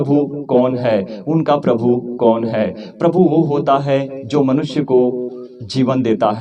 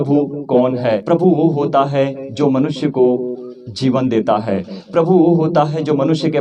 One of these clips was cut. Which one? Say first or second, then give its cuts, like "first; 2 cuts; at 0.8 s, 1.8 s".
second; 1 cut; at 1.0 s